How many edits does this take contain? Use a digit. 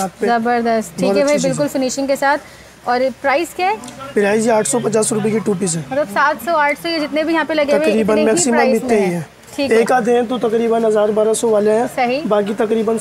0